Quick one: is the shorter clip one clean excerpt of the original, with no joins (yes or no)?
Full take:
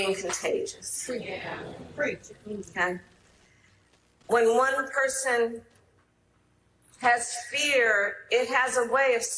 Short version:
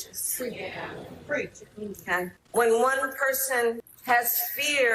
no